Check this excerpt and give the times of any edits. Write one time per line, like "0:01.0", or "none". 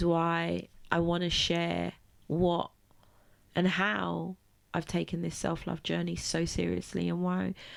none